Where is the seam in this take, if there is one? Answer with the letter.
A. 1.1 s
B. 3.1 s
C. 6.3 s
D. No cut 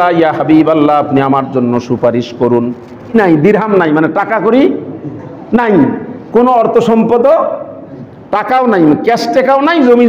B